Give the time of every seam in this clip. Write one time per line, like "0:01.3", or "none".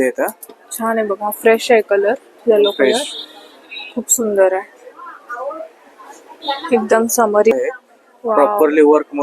0:07.5